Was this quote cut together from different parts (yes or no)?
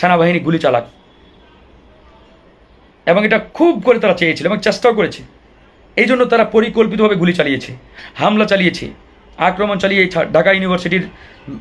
no